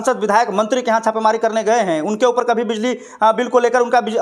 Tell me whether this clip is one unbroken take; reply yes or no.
yes